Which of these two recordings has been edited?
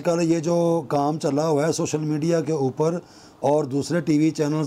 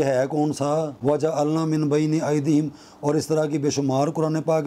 second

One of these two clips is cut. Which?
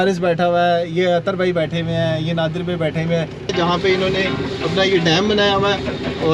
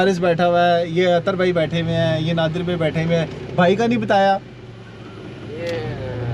first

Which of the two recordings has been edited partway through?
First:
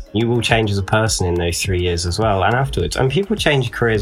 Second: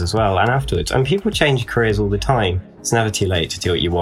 second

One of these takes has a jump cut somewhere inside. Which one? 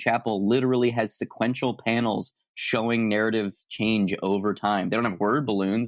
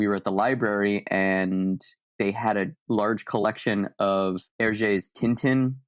second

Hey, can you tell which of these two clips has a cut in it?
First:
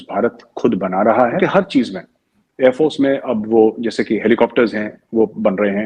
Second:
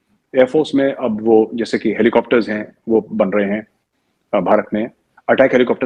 first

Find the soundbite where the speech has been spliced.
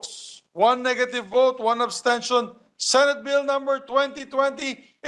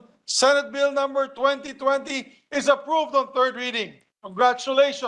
second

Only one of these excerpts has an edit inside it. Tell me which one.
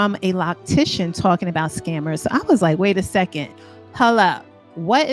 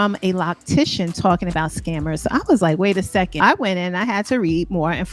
second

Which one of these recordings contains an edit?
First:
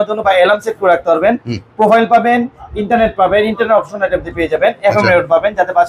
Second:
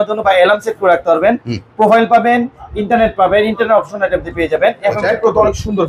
second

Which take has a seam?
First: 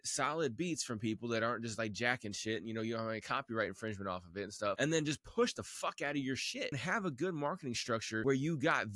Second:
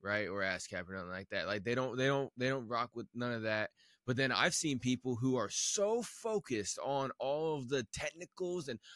first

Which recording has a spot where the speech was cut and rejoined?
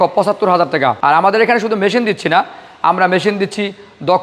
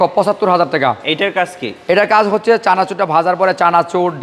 first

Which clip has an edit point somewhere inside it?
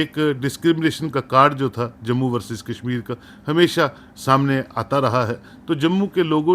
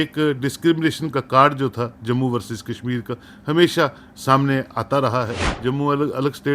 second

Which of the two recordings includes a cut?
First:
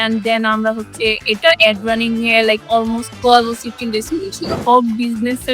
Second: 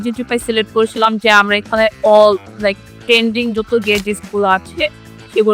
first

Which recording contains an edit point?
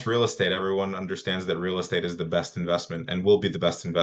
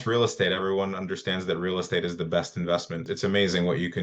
second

